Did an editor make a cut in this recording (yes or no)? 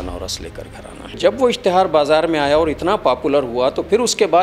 yes